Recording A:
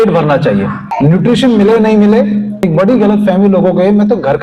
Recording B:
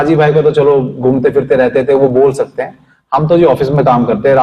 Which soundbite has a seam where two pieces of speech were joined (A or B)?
A